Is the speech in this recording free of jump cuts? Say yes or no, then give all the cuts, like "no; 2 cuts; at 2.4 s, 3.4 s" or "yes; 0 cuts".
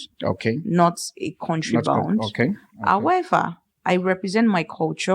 yes; 0 cuts